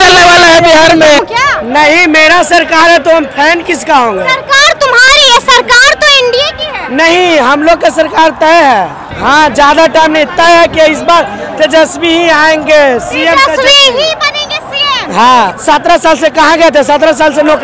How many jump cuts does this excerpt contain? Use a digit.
3